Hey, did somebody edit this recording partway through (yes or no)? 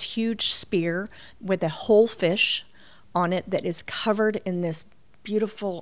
no